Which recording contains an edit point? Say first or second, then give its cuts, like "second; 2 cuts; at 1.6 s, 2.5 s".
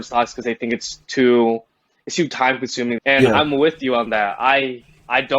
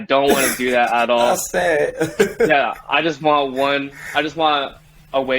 first; 1 cut; at 3.0 s